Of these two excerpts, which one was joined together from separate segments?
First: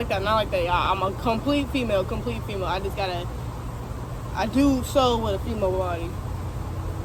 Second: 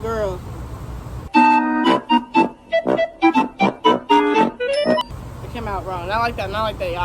second; 1 cut; at 5.0 s

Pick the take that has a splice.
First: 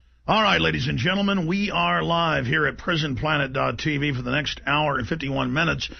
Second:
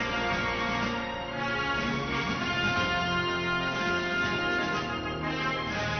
second; 1 cut; at 2.6 s

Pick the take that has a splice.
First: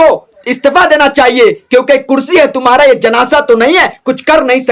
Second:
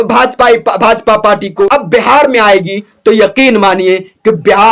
second; 1 cut; at 1.7 s

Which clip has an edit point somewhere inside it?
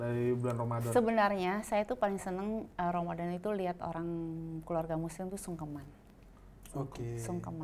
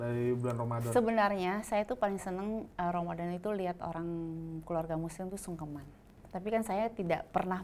second; 1 cut; at 6.2 s

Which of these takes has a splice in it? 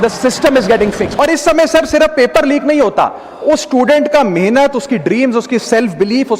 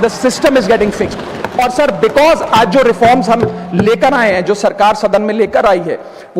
first; 1 cut; at 1.1 s

